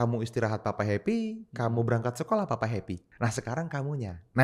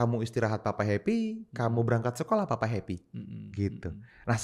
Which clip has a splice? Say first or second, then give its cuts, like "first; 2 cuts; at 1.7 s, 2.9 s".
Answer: first; 1 cut; at 3.1 s